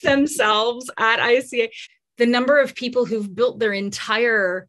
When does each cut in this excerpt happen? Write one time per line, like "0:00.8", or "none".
0:01.8